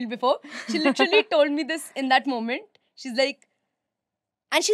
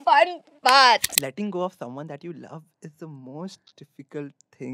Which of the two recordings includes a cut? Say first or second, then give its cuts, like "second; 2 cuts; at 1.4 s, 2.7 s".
second; 1 cut; at 1.1 s